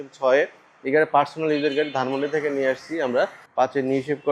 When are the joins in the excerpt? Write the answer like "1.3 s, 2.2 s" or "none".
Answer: 3.4 s